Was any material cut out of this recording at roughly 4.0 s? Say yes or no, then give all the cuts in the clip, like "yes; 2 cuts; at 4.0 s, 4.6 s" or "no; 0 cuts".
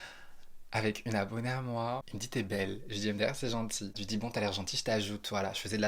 no; 1 cut; at 2.0 s